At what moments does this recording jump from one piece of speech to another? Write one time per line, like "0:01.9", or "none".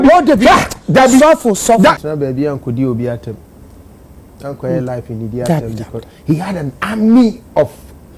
0:02.0